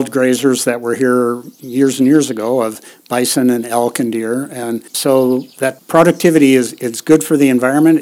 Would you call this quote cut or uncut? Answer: cut